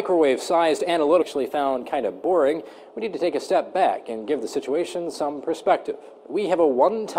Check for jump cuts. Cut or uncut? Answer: uncut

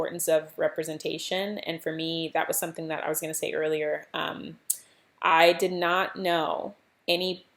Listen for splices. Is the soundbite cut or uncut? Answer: uncut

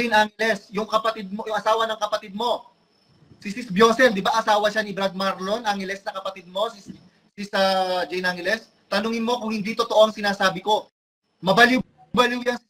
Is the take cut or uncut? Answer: uncut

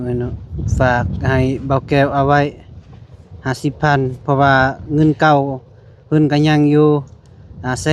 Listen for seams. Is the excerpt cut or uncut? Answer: uncut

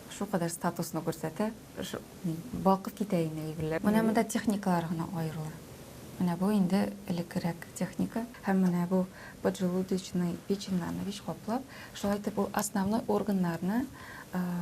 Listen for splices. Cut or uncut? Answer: cut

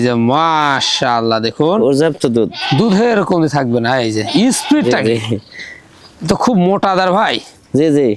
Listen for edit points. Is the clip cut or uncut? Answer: uncut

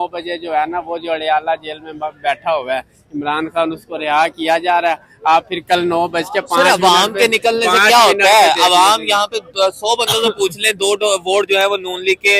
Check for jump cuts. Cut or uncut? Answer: uncut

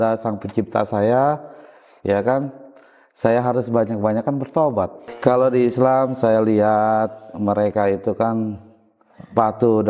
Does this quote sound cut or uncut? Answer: cut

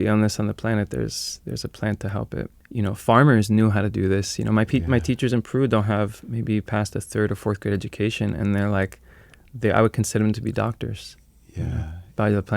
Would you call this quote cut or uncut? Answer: cut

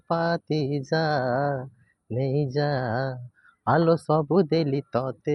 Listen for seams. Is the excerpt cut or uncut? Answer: uncut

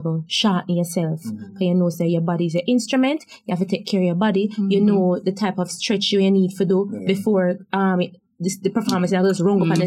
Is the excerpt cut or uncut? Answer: uncut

